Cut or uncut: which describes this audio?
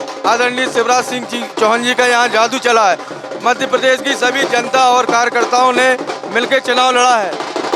uncut